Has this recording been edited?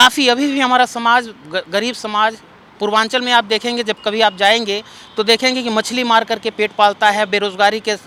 no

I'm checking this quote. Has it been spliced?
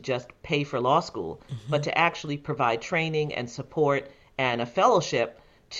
no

